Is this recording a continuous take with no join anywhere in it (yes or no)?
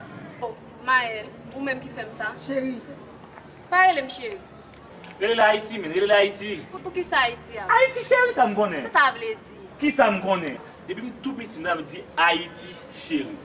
no